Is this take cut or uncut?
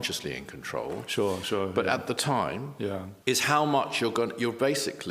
cut